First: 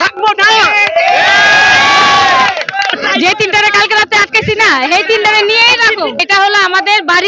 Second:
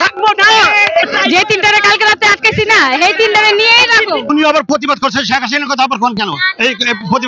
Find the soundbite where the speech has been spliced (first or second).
second